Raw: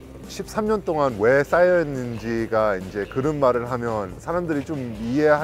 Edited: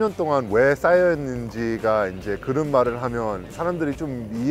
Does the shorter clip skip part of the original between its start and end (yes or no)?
no